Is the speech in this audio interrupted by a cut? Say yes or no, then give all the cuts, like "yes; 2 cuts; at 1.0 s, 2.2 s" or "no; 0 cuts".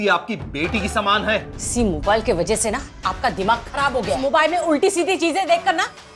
yes; 2 cuts; at 1.6 s, 4.2 s